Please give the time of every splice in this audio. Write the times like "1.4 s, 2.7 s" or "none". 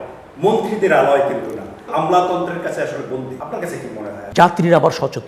1.8 s, 3.4 s, 4.2 s